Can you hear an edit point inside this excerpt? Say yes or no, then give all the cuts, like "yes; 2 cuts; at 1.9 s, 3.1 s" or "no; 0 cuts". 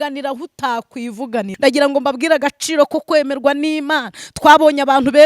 yes; 1 cut; at 1.5 s